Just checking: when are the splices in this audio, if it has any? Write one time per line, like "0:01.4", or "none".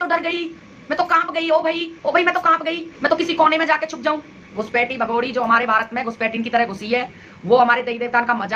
0:04.5